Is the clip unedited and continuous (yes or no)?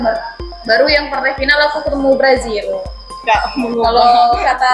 no